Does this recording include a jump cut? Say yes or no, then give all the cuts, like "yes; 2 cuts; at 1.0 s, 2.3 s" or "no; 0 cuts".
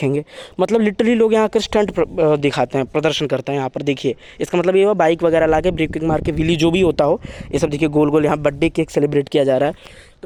no; 0 cuts